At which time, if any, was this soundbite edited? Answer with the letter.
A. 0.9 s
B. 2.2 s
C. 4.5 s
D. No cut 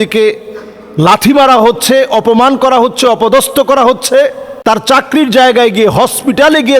C